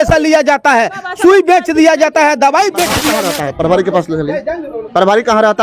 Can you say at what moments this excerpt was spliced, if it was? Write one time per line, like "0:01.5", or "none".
0:03.1